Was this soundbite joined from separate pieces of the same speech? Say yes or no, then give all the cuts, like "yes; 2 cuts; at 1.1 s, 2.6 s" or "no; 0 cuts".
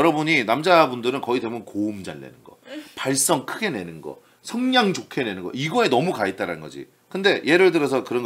no; 0 cuts